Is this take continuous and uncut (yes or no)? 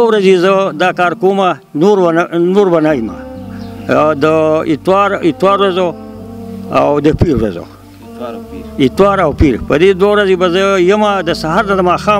yes